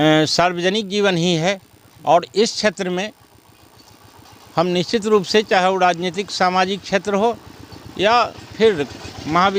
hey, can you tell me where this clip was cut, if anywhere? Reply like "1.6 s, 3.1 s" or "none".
none